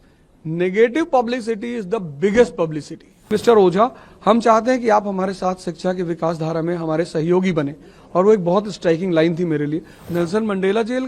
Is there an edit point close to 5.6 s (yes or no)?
no